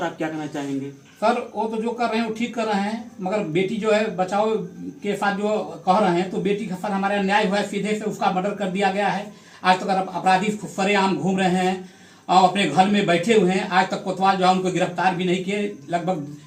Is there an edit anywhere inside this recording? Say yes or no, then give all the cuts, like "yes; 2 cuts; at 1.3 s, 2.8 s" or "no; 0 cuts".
no; 0 cuts